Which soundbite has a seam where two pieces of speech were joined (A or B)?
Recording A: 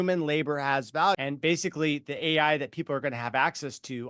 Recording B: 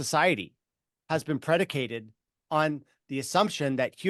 A